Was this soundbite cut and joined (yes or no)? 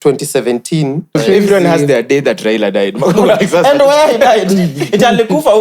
yes